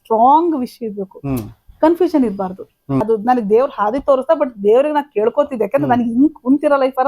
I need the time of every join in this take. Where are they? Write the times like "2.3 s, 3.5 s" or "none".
3.0 s